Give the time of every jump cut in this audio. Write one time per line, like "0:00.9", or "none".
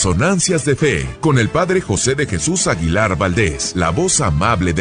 0:01.1
0:03.6